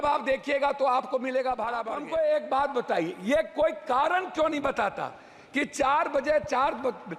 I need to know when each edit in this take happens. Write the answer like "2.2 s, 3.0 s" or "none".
1.9 s